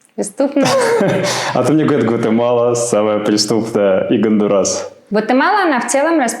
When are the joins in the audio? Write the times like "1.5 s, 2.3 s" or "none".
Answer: 4.9 s